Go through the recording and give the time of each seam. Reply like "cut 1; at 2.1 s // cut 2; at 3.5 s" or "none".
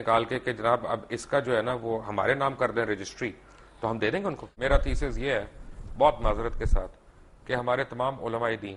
cut 1; at 4.5 s